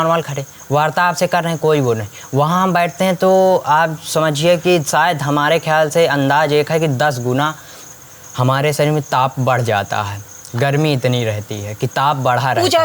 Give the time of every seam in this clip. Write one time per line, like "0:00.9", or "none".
none

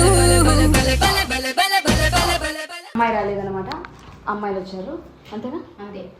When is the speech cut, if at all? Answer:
0:02.9

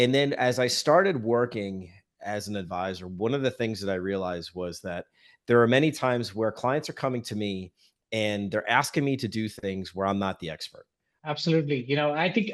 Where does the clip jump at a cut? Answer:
0:11.2

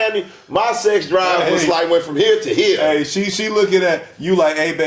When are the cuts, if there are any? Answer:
none

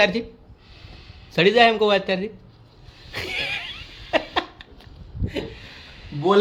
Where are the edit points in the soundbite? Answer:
none

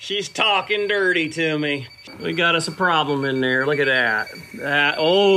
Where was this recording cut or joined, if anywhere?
0:01.9

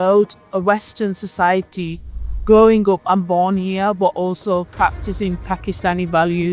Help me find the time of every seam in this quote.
0:04.7

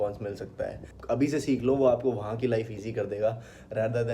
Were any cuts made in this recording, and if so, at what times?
0:00.9

